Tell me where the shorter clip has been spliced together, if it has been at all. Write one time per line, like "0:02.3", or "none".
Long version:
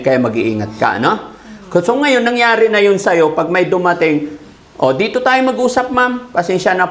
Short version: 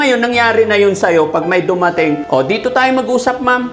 0:02.2